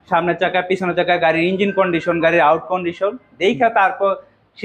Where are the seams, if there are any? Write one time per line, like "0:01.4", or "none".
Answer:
none